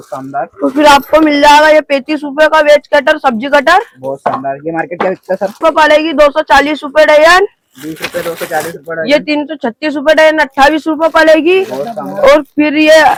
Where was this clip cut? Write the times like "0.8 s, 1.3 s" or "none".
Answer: none